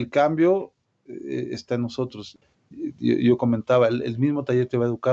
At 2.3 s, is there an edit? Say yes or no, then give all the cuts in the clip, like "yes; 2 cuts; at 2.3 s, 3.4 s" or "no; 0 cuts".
yes; 1 cut; at 2.3 s